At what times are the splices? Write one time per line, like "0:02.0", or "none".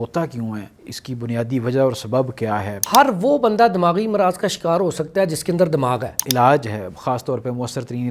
0:02.8
0:06.2